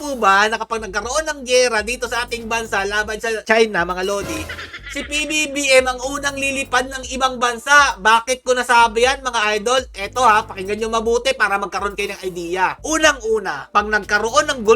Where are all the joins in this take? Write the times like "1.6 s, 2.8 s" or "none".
none

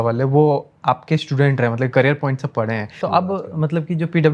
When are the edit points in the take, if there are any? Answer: 2.9 s

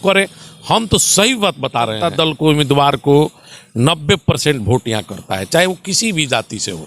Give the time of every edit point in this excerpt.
2.1 s

